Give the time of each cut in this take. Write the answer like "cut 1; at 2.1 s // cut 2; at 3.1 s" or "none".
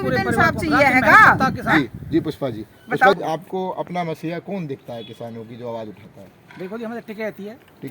cut 1; at 3.2 s

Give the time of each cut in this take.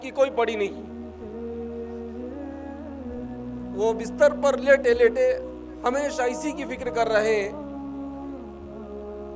none

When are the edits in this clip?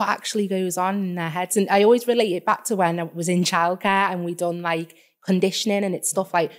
none

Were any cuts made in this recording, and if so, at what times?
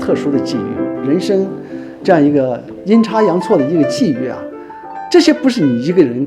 cut 1; at 0.9 s

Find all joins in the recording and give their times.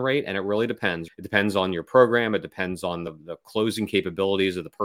cut 1; at 1.0 s // cut 2; at 3.1 s

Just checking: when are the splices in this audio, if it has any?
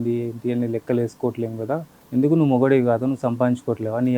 cut 1; at 1.9 s

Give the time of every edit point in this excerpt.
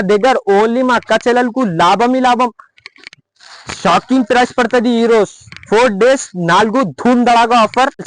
none

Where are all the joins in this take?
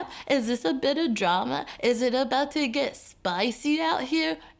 none

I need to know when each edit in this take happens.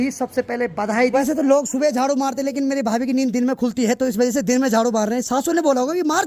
cut 1; at 1.2 s

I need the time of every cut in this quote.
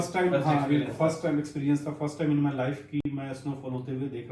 none

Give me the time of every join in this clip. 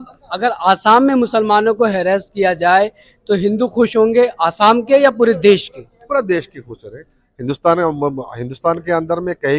none

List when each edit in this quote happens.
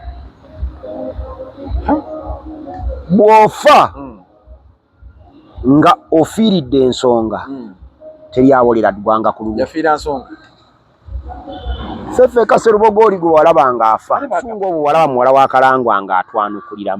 cut 1; at 14.6 s

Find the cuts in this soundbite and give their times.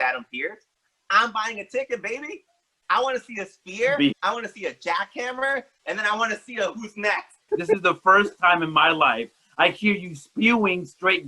cut 1; at 2.8 s // cut 2; at 7.4 s

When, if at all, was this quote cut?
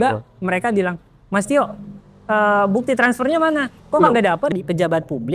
cut 1; at 3.8 s // cut 2; at 4.5 s

